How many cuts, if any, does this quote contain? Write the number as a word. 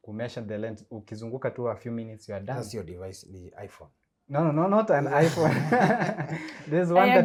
zero